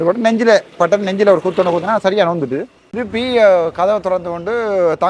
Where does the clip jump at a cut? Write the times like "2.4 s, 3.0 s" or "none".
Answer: 3.1 s